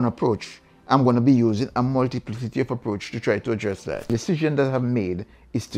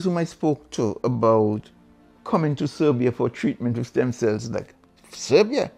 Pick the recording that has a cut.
first; 1 cut; at 4.1 s

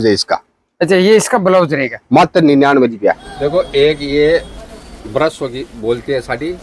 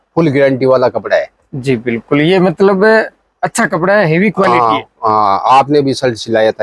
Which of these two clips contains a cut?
first; 1 cut; at 3.3 s

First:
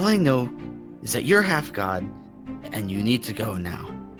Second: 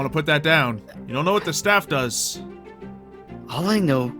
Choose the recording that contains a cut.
second; 1 cut; at 0.9 s

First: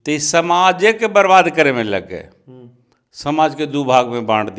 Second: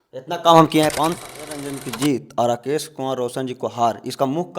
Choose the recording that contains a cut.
second; 1 cut; at 1.0 s

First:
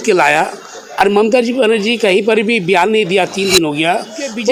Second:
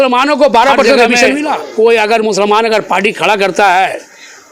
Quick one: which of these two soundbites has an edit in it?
second; 1 cut; at 1.6 s

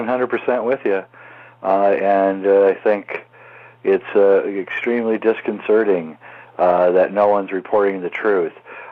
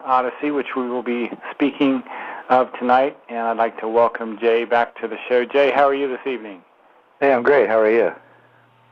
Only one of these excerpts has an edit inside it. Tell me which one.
second; 1 cut; at 7.8 s

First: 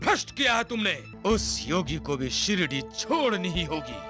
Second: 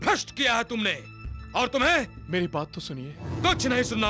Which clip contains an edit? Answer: first; 1 cut; at 1.1 s

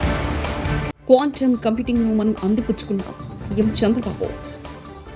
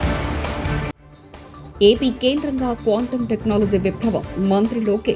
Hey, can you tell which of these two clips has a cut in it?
first; 1 cut; at 0.9 s

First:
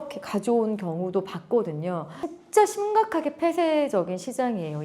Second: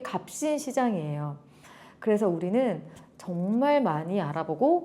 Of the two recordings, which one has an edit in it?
first; 1 cut; at 2.4 s

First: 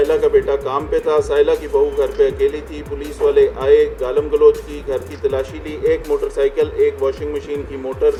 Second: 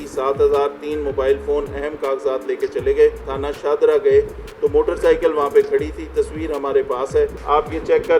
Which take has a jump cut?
second; 2 cuts; at 3.3 s, 7.4 s

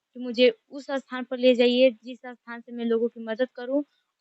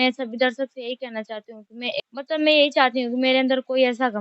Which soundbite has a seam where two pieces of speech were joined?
second; 1 cut; at 2.0 s

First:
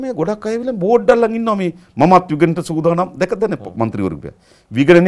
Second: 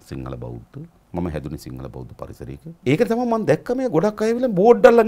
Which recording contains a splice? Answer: second; 2 cuts; at 1.0 s, 2.8 s

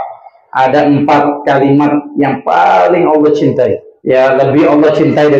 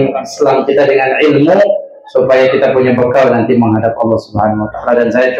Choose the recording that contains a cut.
first; 1 cut; at 3.9 s

